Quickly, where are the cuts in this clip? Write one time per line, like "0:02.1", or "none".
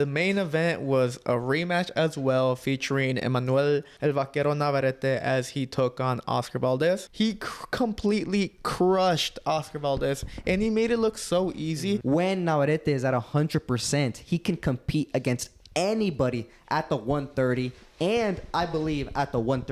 0:03.9
0:07.1
0:12.0